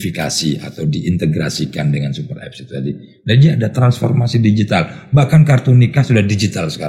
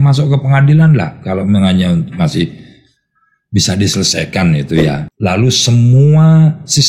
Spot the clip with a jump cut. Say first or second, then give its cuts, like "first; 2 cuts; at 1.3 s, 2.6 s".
second; 1 cut; at 5.1 s